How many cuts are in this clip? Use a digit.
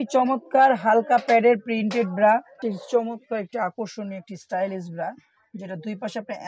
1